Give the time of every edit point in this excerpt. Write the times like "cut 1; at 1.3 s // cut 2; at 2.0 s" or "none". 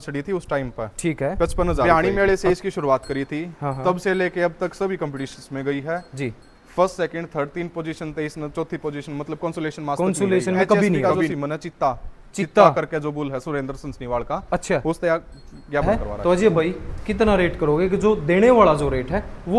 cut 1; at 1.8 s // cut 2; at 11.3 s // cut 3; at 15.8 s